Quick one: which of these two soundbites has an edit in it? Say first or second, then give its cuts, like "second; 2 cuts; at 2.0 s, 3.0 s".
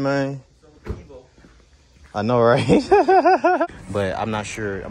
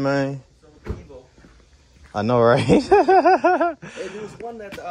first; 1 cut; at 3.7 s